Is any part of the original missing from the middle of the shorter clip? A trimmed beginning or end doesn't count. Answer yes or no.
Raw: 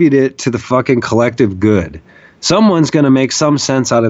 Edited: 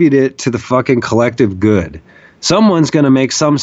no